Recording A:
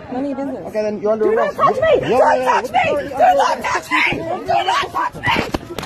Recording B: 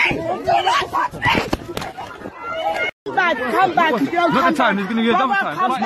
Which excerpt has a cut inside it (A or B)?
B